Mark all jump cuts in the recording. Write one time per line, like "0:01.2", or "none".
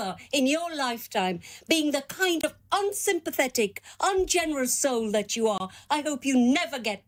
none